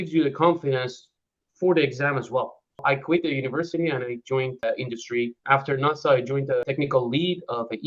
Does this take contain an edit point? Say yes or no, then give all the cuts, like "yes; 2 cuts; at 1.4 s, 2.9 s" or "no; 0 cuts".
yes; 3 cuts; at 2.8 s, 4.8 s, 6.6 s